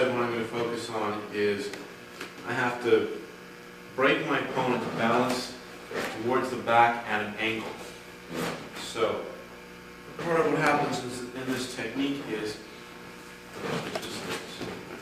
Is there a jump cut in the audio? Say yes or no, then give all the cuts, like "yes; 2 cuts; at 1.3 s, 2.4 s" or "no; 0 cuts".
no; 0 cuts